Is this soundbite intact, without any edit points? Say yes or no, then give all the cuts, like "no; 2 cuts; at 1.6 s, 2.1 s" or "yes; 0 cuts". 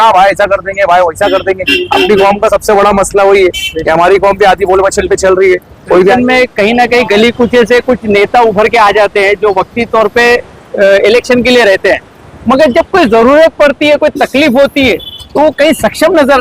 no; 1 cut; at 6.2 s